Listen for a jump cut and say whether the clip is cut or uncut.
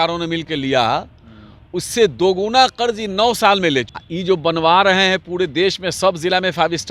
cut